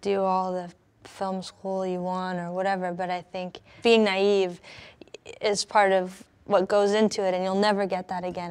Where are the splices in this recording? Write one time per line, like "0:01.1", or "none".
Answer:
0:03.7